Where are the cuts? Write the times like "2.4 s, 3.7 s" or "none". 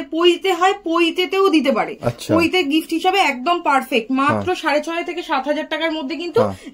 none